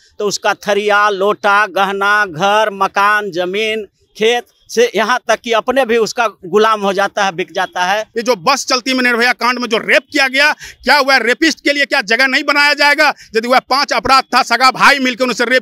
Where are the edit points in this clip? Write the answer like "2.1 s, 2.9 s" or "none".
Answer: 8.1 s